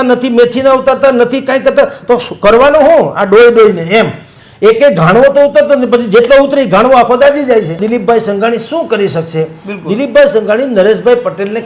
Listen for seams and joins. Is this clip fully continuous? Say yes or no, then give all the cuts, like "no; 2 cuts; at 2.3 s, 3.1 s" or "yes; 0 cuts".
no; 1 cut; at 7.8 s